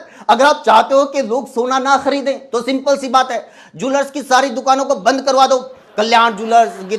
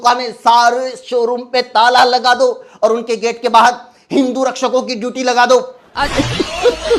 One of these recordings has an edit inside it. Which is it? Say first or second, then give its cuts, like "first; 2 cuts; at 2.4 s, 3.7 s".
second; 1 cut; at 5.8 s